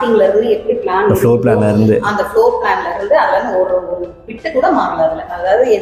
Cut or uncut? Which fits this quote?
uncut